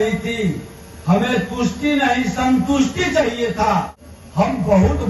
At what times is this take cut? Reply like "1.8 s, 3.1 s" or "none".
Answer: 4.0 s